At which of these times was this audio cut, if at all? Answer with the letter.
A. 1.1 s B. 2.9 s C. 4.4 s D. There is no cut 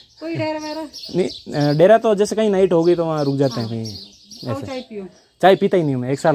D